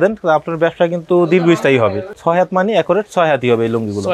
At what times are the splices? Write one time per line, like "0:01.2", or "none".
0:02.1